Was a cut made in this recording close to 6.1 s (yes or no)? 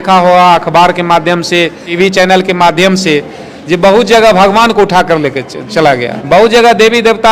yes